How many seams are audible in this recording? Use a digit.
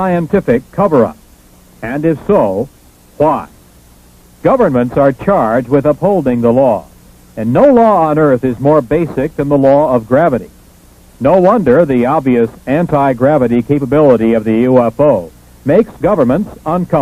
0